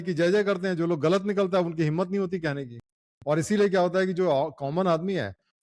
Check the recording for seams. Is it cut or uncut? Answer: uncut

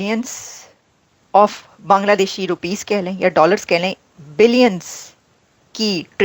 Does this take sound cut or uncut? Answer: uncut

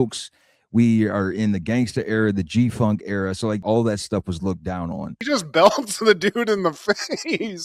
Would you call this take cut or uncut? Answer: cut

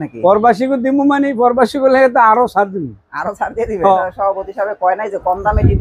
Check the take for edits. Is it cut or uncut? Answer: cut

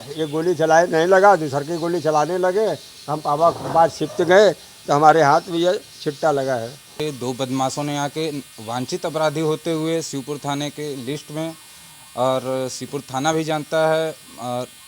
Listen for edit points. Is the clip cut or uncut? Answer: cut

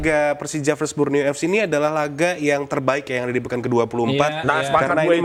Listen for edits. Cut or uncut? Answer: uncut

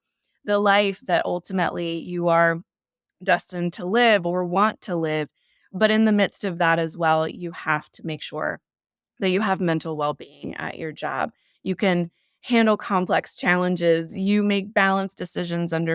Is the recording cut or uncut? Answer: uncut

